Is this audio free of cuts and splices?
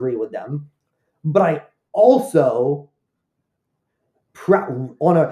yes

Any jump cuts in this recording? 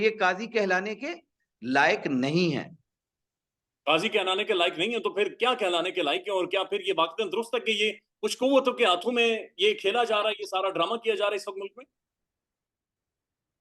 no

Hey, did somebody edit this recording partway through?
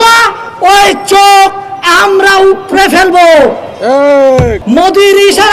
yes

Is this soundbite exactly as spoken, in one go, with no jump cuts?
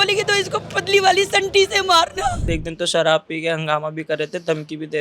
no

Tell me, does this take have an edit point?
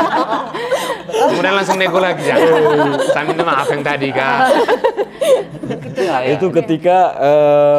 yes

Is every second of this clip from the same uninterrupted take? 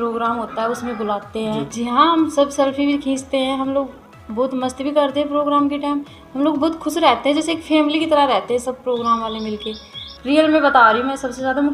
no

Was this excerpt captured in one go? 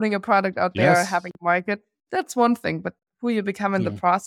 yes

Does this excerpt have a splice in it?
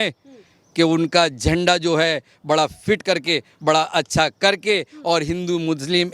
no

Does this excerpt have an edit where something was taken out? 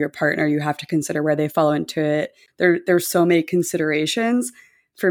yes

